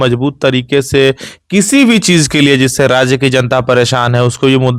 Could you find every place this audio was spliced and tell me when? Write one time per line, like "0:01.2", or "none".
none